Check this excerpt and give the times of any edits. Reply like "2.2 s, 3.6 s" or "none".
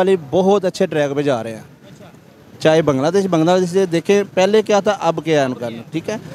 none